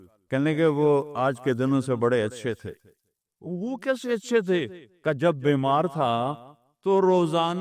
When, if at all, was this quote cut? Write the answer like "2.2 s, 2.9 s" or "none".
3.4 s